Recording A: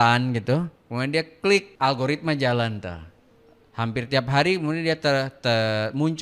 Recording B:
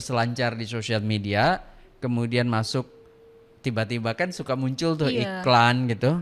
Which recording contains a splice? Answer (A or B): A